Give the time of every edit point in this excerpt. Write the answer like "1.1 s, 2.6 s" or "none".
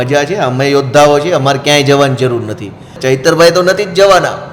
2.9 s